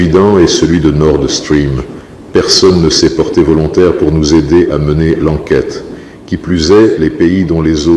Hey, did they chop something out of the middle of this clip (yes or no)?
yes